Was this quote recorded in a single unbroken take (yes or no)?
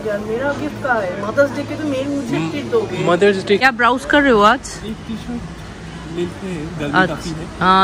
no